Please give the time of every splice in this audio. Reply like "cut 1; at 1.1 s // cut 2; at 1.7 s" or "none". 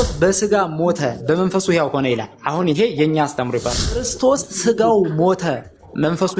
cut 1; at 4.1 s

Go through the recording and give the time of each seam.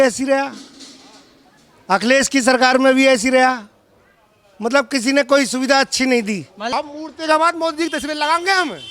cut 1; at 6.6 s

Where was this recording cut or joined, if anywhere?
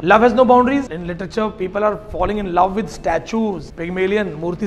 cut 1; at 0.9 s // cut 2; at 3.7 s

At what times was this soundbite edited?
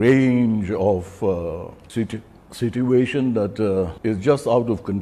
cut 1; at 1.8 s // cut 2; at 3.9 s

